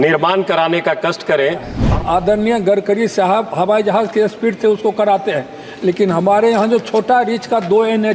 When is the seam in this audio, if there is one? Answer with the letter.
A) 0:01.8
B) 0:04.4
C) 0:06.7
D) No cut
A